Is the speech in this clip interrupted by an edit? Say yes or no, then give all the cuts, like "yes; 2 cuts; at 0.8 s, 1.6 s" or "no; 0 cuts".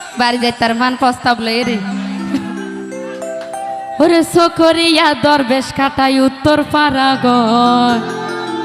no; 0 cuts